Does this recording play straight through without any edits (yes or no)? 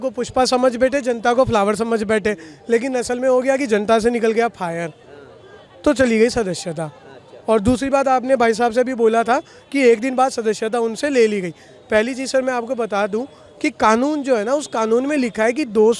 yes